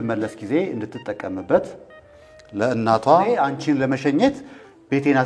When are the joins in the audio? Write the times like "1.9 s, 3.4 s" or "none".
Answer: 3.4 s